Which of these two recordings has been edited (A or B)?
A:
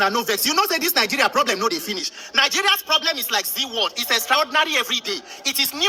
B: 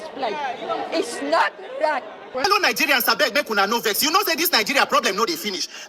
B